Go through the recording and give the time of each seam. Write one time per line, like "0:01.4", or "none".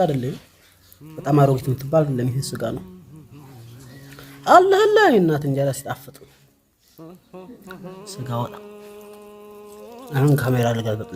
none

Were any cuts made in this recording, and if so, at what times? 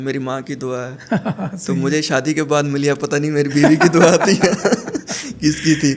none

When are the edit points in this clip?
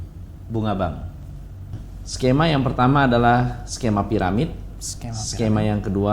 0:01.8

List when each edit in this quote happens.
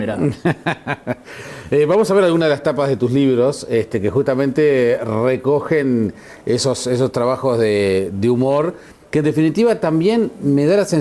0:04.7

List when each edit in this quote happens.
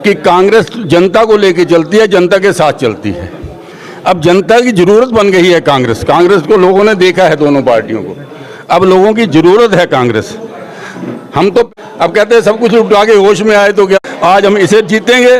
0:11.7
0:14.0

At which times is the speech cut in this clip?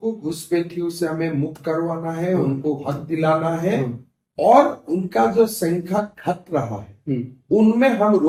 none

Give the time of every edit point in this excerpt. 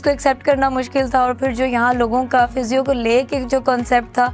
none

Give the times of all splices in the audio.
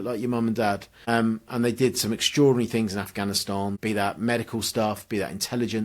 0:00.9
0:03.8

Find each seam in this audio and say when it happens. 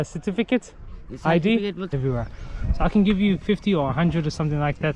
0:01.9

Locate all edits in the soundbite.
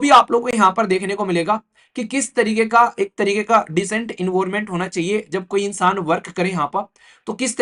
none

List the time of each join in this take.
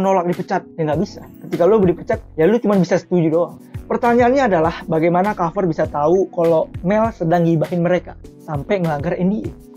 0:03.6

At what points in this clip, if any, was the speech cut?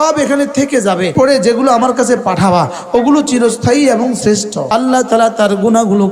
0:01.1
0:04.6

